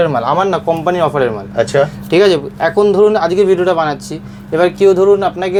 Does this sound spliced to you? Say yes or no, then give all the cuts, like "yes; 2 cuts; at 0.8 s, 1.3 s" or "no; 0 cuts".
no; 0 cuts